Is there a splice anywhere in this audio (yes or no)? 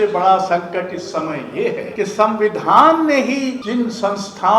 yes